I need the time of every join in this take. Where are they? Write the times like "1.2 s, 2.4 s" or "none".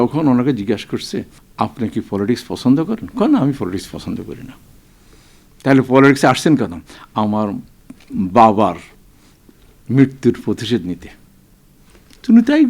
1.4 s